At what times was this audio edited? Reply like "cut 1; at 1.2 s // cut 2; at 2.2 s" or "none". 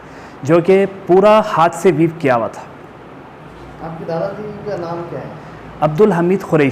none